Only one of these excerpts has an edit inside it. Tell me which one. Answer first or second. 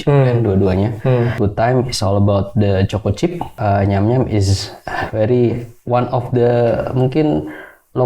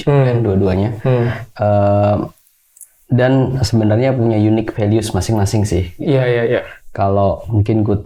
first